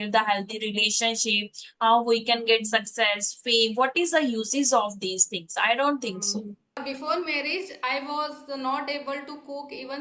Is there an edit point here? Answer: yes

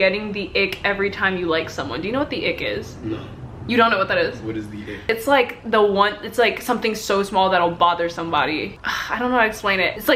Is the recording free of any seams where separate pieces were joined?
yes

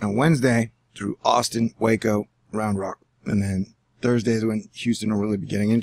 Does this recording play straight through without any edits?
yes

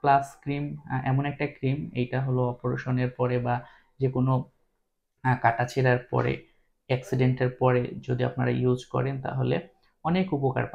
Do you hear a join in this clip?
no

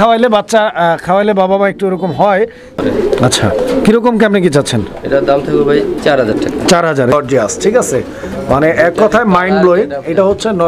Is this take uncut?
no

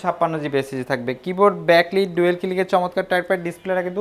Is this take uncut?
yes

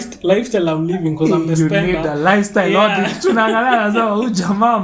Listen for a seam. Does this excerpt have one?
no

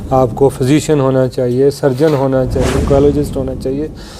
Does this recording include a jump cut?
yes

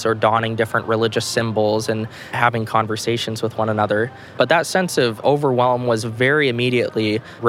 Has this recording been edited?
no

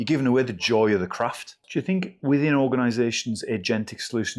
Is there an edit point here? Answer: yes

